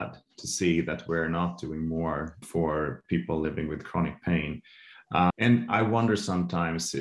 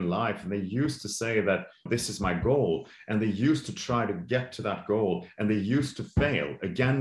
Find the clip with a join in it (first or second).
first